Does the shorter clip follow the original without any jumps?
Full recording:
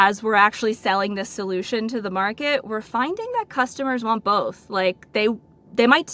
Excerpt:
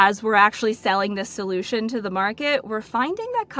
yes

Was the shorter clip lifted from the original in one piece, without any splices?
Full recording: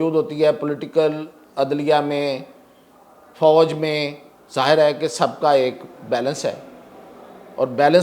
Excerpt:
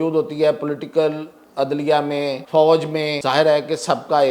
no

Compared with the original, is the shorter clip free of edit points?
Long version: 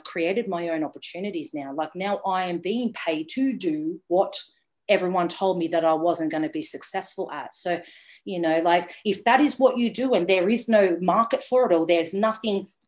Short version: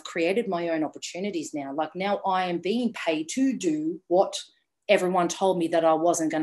yes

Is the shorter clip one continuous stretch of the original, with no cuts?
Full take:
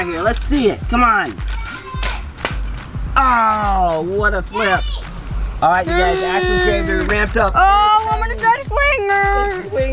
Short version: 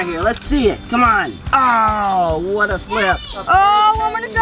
no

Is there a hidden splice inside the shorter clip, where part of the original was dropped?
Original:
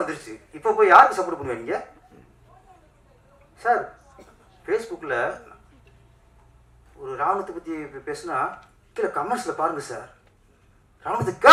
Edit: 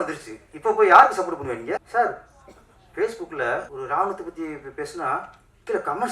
yes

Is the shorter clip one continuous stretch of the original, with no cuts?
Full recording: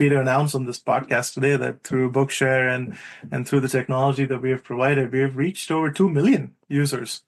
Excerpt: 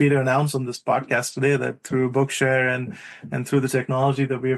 yes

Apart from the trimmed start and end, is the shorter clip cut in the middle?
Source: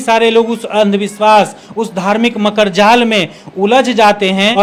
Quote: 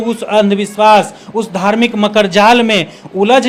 no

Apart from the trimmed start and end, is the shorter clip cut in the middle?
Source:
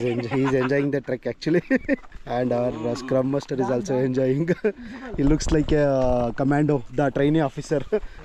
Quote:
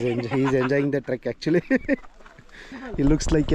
yes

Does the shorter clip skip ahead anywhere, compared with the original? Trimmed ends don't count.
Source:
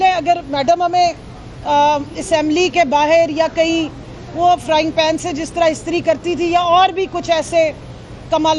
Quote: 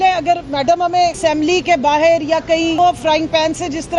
yes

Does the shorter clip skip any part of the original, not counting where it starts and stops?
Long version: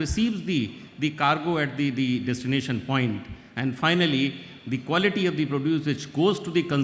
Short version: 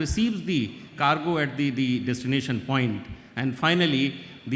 yes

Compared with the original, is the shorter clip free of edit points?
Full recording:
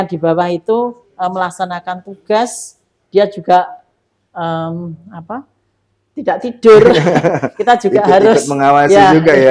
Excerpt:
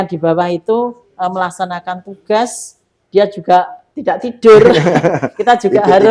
no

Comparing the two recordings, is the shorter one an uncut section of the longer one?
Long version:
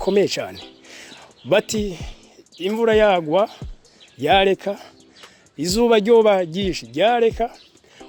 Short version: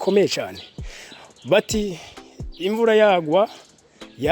yes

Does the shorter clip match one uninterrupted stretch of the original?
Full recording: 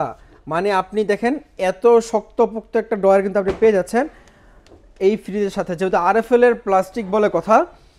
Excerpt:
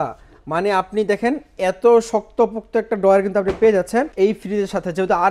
no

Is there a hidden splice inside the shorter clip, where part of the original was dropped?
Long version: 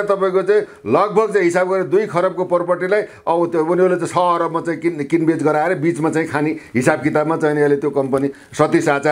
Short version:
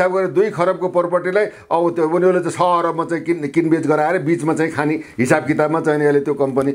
no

